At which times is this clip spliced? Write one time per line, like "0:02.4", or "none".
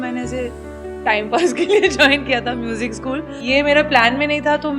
0:03.3